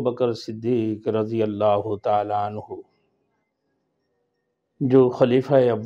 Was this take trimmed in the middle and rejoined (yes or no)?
no